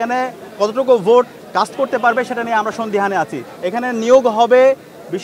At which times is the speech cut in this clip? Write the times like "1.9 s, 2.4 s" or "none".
3.5 s